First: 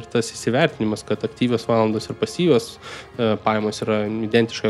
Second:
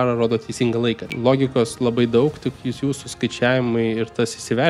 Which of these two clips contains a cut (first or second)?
second